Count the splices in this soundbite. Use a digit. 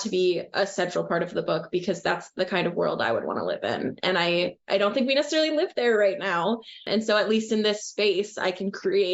1